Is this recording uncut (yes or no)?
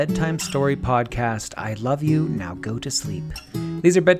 yes